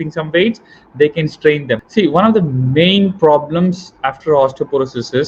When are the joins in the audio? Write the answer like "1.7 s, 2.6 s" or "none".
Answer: 1.9 s

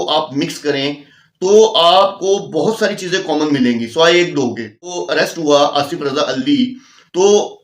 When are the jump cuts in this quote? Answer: 5.0 s

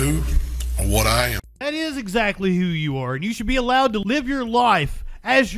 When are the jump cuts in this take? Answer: 1.5 s, 4.0 s

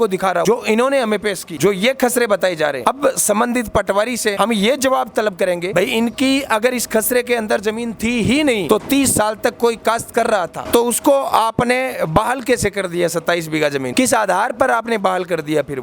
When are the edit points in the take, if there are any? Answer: none

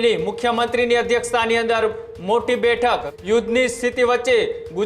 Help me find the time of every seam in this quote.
3.1 s

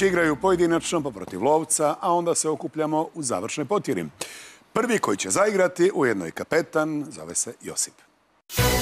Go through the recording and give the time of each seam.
5.6 s

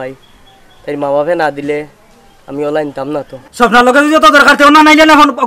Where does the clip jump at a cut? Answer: 3.4 s

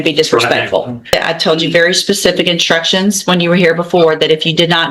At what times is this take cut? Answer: 1.1 s

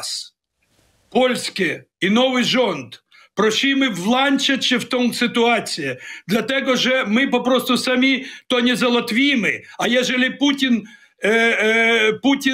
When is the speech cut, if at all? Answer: none

